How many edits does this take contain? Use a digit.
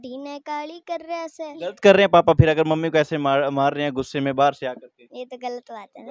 1